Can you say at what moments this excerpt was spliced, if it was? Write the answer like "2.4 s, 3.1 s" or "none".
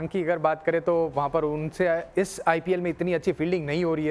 none